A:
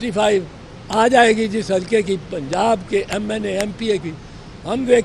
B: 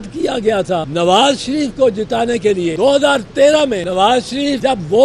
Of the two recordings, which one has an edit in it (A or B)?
B